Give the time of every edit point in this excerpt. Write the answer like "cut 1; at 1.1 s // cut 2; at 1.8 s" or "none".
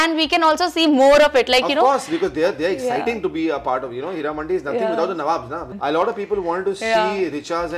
cut 1; at 5.7 s